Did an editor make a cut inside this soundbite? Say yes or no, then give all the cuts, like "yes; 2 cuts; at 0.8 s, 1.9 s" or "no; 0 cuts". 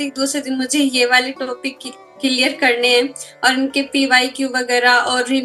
no; 0 cuts